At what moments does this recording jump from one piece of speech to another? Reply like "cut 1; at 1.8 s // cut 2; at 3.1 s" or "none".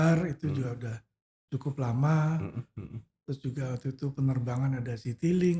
none